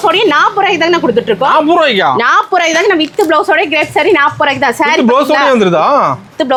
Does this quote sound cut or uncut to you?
uncut